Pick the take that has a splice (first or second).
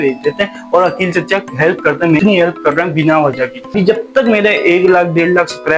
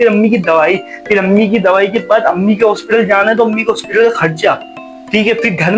first